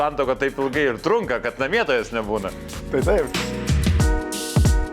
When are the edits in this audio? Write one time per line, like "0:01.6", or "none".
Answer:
0:03.3